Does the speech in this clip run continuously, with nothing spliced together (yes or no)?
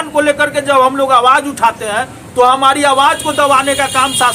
yes